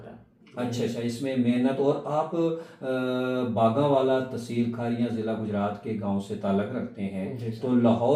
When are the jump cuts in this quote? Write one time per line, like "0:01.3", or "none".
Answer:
none